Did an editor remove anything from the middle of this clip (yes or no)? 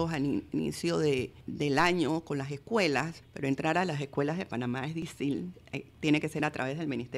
yes